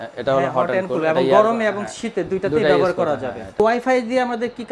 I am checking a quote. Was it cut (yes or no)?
yes